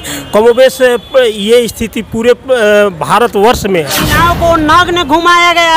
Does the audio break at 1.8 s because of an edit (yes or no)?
no